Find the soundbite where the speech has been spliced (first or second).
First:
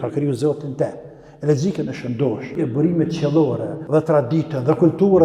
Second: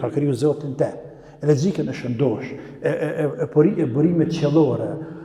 first